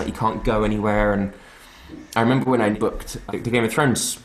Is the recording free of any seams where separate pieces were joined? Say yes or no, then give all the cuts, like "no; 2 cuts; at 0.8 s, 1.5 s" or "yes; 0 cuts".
no; 1 cut; at 3.0 s